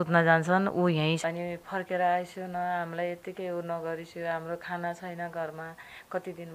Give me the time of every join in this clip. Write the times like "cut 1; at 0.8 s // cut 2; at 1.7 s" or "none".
cut 1; at 1.2 s